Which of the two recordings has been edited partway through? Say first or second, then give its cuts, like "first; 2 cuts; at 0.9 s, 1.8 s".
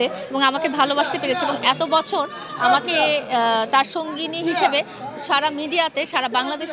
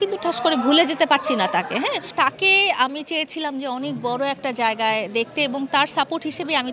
second; 1 cut; at 2.1 s